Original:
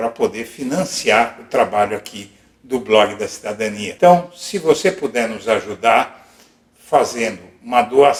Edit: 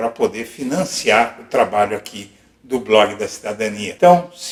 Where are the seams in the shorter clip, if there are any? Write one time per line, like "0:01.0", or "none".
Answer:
none